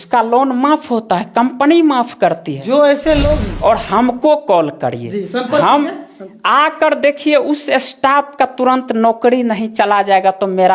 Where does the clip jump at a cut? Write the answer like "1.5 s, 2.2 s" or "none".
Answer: 3.4 s